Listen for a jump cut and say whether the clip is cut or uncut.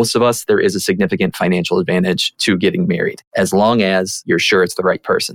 cut